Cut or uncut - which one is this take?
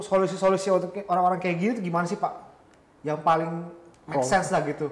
uncut